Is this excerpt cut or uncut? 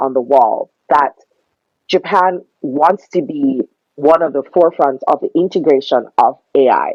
uncut